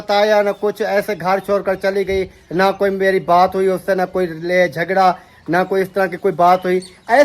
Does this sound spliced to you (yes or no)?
no